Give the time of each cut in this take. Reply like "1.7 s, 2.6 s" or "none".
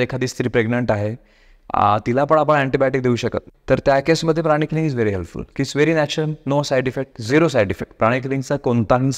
3.5 s